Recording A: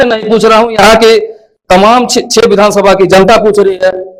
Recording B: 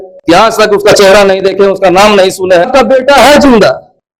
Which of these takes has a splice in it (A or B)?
B